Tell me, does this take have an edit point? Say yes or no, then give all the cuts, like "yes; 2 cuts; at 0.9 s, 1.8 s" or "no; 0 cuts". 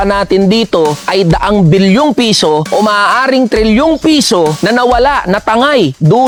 no; 0 cuts